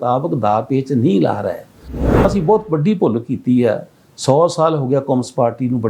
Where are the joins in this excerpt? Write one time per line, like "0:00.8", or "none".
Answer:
0:02.2